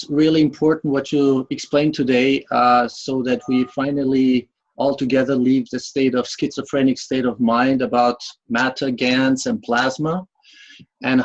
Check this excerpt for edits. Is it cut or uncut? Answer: uncut